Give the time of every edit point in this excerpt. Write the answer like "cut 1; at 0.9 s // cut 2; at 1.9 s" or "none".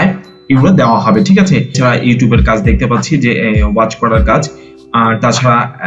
cut 1; at 1.7 s